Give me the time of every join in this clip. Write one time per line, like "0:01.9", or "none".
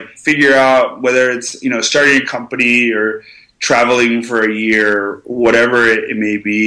none